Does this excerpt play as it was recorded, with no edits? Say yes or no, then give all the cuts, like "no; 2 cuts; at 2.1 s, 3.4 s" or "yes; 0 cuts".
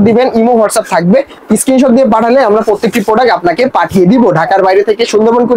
yes; 0 cuts